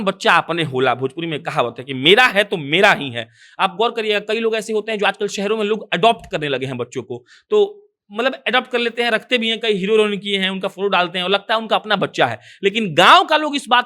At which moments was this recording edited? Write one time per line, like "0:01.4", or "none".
none